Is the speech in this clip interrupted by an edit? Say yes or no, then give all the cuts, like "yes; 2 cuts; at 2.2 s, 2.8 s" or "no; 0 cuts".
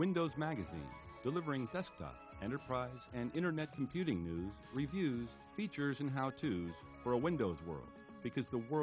no; 0 cuts